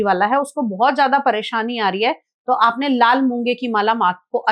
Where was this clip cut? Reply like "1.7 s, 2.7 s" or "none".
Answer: none